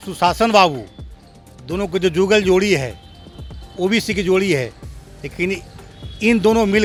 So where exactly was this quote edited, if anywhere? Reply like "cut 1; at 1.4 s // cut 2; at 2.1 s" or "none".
none

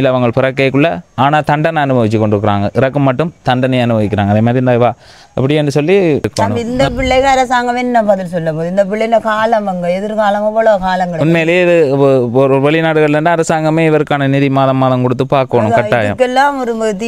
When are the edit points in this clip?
cut 1; at 6.3 s

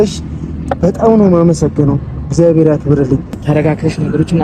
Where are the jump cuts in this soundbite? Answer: cut 1; at 3.4 s

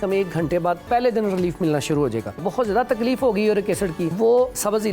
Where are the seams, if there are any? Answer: cut 1; at 0.8 s // cut 2; at 2.4 s // cut 3; at 4.1 s

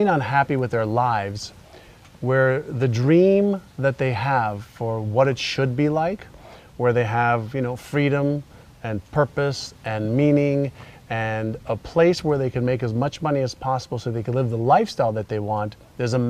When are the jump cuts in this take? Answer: cut 1; at 15.2 s

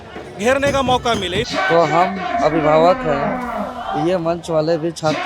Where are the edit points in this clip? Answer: cut 1; at 1.4 s

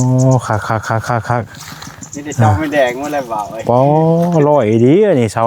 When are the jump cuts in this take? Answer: none

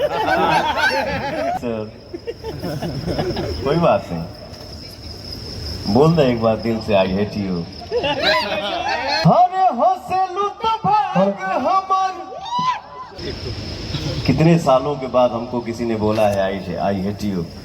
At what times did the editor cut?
cut 1; at 1.6 s // cut 2; at 9.2 s // cut 3; at 13.2 s

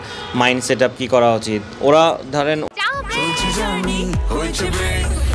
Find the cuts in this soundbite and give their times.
none

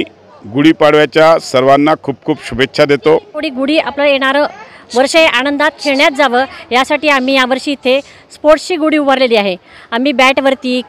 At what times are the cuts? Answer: cut 1; at 3.5 s

